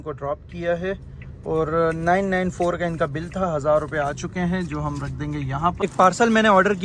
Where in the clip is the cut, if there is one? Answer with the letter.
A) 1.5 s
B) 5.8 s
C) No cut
B